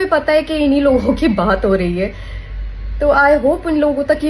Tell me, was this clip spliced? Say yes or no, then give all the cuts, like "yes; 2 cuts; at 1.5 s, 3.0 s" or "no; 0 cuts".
no; 0 cuts